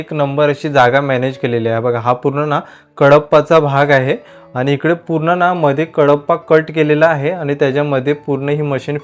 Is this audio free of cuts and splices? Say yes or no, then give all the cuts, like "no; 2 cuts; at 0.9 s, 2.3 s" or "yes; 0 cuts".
yes; 0 cuts